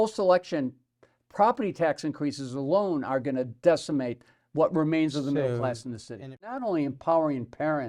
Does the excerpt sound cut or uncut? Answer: cut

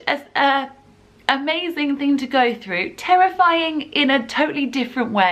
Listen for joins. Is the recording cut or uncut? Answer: uncut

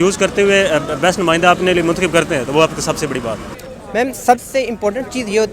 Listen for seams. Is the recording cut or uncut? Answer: cut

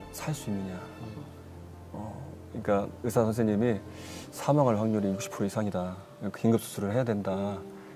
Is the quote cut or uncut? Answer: uncut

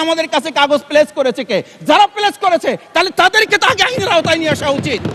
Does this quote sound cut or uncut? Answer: uncut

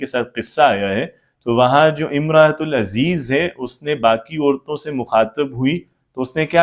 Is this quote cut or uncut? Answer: uncut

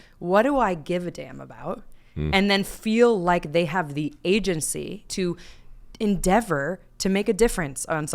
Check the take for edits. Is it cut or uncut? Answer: cut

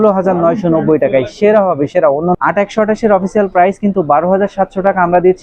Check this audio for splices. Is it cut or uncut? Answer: cut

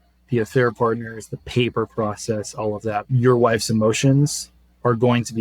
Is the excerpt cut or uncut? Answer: cut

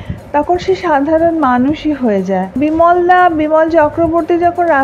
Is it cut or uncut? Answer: cut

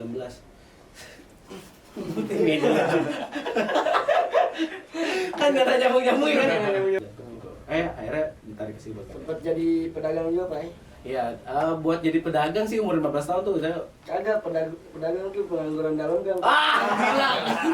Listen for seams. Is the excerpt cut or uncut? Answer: cut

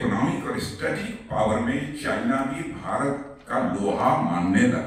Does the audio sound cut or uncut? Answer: uncut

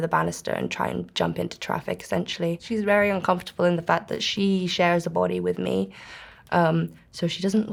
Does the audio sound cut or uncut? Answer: uncut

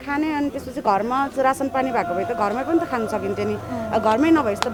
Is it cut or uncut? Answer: uncut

